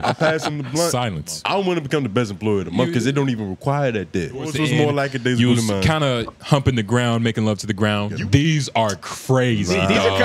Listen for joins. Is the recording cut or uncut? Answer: cut